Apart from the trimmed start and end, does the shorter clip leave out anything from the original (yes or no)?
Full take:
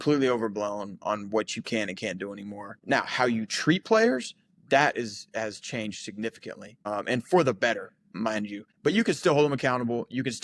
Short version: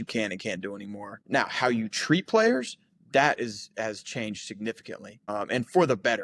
no